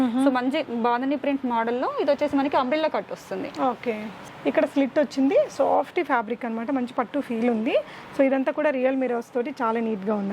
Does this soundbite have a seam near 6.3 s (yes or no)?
no